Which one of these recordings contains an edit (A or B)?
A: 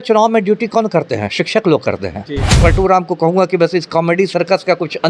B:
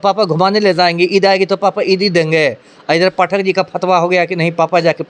A